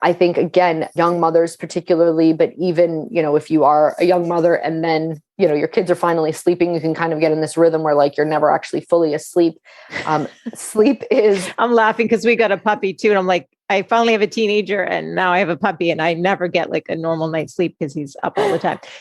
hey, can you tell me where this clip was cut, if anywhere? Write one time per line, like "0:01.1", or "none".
0:00.9